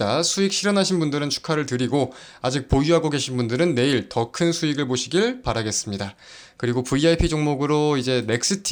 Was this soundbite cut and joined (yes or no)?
no